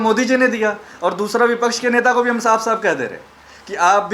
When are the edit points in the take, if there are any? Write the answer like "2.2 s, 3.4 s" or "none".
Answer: none